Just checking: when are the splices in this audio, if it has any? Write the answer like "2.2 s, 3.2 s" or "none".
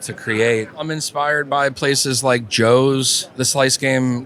0.8 s, 3.2 s